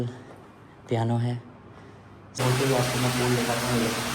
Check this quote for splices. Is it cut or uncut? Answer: cut